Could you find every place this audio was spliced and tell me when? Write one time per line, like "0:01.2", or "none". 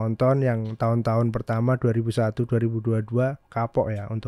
none